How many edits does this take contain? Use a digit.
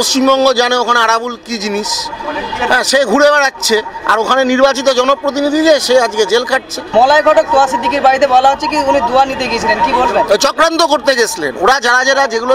0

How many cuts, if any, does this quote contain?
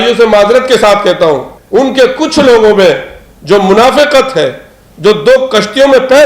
1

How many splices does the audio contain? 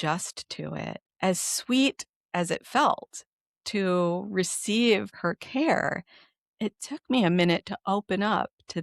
2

